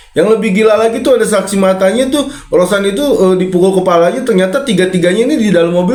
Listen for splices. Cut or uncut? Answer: uncut